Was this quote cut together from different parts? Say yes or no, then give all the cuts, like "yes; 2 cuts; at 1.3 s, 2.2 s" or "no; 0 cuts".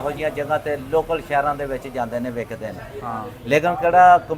no; 0 cuts